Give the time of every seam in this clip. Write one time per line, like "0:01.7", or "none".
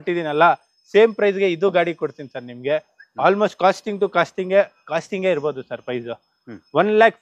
none